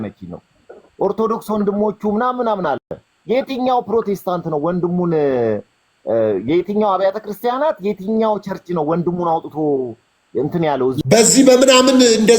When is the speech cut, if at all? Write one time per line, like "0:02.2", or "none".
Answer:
0:11.0